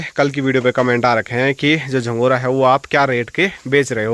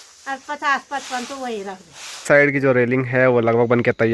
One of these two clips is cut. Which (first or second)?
second